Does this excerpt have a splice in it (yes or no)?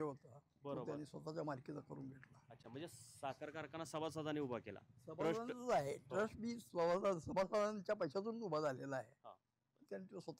no